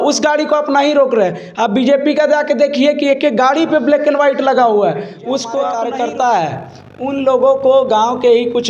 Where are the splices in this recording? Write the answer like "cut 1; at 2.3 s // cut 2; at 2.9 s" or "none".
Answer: cut 1; at 5.8 s